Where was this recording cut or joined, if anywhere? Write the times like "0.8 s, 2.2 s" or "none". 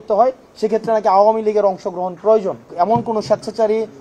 2.6 s

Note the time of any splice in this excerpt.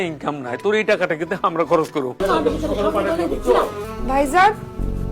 2.2 s, 3.8 s

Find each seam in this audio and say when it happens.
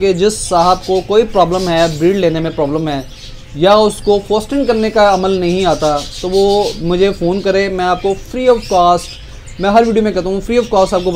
none

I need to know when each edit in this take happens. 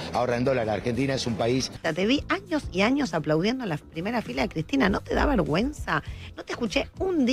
1.7 s

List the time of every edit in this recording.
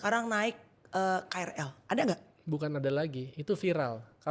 none

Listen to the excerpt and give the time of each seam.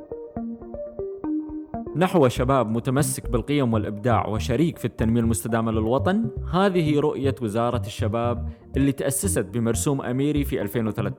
1.9 s

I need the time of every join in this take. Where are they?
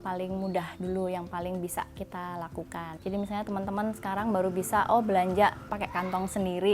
2.9 s, 5.7 s

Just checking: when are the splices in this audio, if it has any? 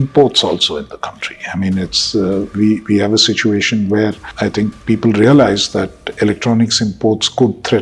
4.3 s

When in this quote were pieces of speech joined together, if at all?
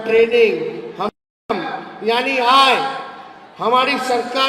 1.3 s

